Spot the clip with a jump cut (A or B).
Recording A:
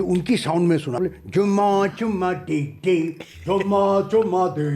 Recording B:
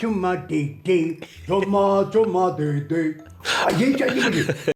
A